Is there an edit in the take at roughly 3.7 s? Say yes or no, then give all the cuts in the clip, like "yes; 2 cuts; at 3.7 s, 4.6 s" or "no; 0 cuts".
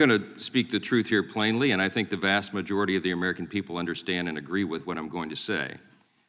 no; 1 cut; at 1.1 s